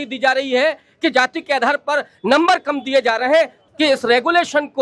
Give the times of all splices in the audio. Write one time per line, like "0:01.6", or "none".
0:03.6